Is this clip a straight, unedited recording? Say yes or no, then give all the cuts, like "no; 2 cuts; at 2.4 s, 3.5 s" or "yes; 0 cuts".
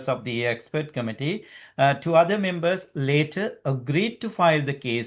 yes; 0 cuts